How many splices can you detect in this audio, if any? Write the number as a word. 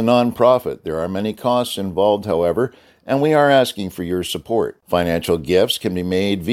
zero